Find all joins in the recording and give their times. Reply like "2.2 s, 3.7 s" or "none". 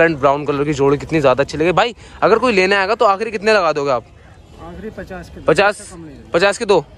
none

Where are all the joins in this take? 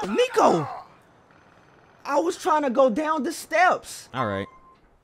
4.0 s

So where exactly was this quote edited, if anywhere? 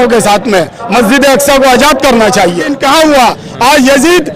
2.7 s

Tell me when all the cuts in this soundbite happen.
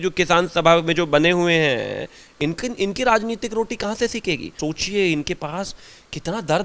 4.5 s

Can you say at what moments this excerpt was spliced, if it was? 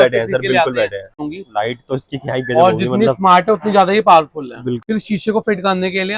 1.2 s, 4.8 s

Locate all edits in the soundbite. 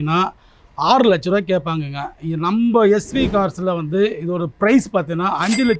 none

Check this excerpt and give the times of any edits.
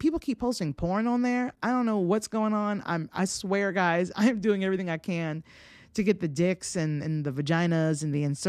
none

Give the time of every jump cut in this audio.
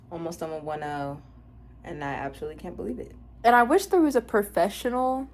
3.3 s

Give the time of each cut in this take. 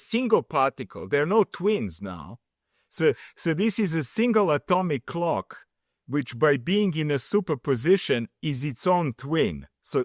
none

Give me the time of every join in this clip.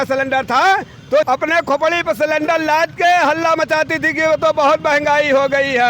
1.3 s

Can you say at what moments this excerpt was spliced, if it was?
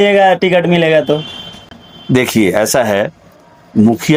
none

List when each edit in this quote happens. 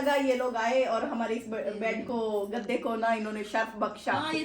none

